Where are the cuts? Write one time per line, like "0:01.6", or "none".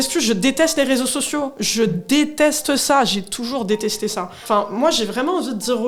0:04.4